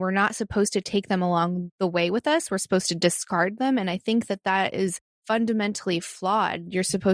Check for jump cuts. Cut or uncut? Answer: cut